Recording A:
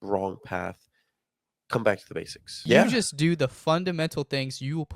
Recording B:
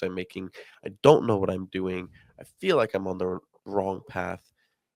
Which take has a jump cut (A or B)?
A